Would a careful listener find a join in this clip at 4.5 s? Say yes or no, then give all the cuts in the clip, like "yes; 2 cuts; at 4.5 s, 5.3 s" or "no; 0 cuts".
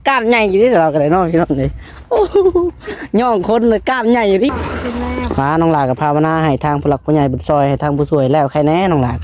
yes; 1 cut; at 4.5 s